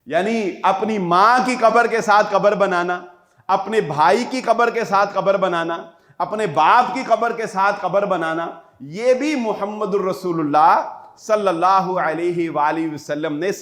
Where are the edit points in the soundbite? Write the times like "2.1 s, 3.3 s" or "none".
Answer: none